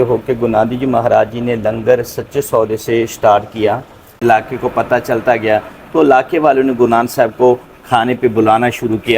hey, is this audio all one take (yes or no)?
no